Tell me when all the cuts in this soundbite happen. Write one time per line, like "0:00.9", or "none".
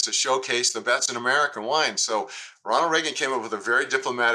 0:01.5